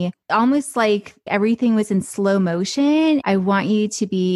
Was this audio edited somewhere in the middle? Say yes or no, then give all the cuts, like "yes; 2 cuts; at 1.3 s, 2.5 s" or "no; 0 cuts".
yes; 1 cut; at 3.2 s